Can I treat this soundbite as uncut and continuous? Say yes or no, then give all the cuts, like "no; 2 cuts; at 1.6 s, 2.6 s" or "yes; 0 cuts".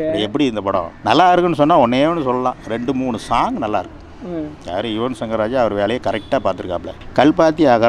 yes; 0 cuts